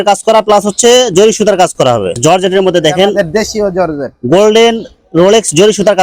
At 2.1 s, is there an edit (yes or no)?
yes